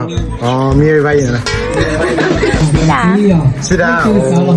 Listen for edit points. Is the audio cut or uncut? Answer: cut